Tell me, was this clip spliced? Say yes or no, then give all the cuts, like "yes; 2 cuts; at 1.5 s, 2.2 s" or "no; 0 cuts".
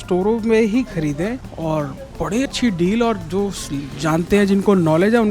yes; 2 cuts; at 1.5 s, 2.5 s